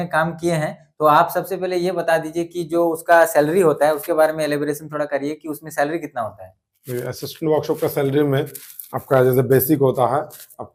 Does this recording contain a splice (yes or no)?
no